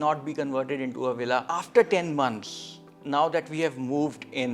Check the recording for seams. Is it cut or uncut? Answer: cut